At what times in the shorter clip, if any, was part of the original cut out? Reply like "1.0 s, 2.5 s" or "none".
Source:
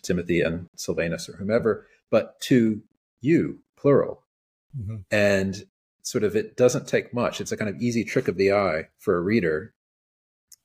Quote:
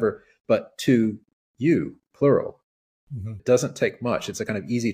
3.4 s